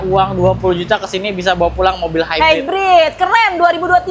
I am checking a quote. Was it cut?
no; 0 cuts

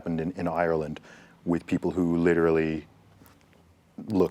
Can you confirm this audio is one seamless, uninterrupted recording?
yes; 0 cuts

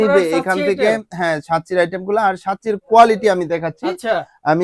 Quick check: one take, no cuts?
yes; 0 cuts

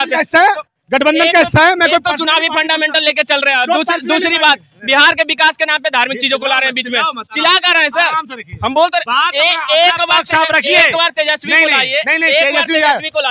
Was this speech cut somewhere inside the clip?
no; 0 cuts

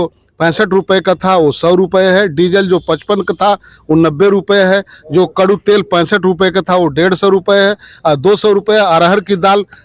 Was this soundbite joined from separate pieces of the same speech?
no; 0 cuts

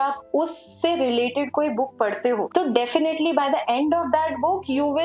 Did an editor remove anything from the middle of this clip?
no; 0 cuts

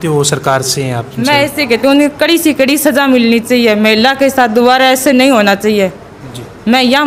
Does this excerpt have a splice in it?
no; 0 cuts

